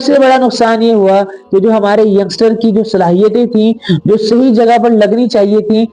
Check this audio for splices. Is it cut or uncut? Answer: uncut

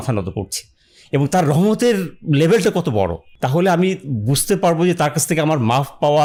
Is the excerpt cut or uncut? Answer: uncut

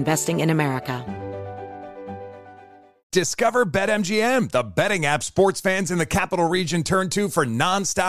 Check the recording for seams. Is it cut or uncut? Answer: cut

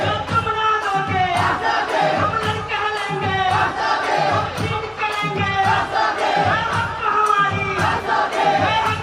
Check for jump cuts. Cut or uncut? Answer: uncut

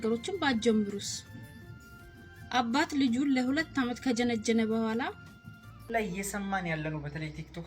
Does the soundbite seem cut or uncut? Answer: cut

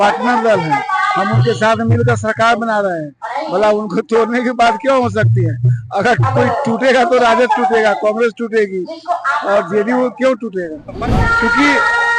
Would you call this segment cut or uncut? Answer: cut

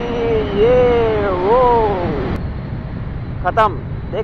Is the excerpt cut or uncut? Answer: cut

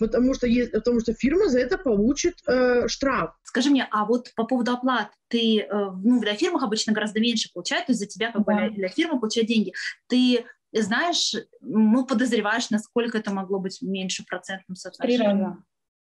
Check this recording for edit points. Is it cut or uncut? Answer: cut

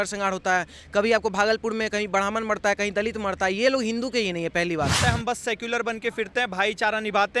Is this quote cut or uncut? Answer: cut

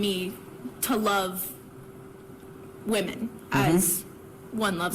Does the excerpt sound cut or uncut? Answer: cut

